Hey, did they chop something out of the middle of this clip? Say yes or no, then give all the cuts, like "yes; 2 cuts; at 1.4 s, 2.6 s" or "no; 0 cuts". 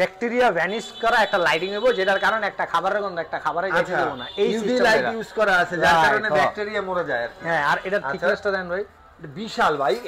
no; 0 cuts